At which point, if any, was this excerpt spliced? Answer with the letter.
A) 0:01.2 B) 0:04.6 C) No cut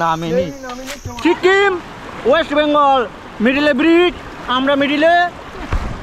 A